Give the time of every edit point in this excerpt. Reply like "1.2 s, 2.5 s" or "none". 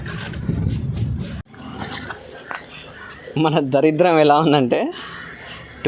1.4 s